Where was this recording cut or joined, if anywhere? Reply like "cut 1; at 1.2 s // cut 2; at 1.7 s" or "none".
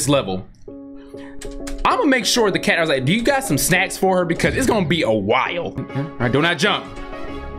cut 1; at 5.8 s